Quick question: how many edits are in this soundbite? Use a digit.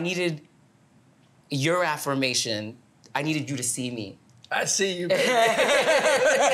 0